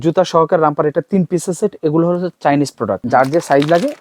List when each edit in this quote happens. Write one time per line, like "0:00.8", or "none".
0:03.0